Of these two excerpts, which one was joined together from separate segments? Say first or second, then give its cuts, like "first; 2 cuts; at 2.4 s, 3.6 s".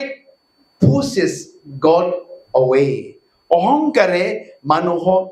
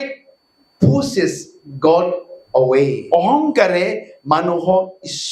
second; 1 cut; at 3.0 s